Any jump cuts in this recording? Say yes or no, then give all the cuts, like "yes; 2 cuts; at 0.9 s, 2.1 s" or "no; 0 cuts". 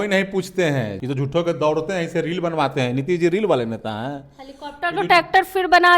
yes; 1 cut; at 0.9 s